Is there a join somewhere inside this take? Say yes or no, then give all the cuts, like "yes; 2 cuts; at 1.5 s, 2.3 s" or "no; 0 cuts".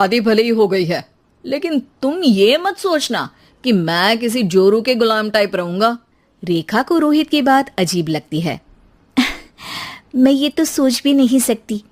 no; 0 cuts